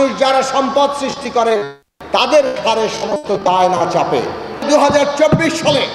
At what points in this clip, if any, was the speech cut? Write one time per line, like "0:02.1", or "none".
0:04.7